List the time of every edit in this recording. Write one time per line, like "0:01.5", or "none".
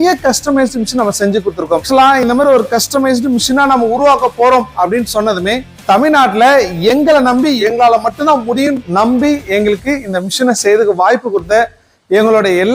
0:01.9
0:05.7
0:07.6
0:08.8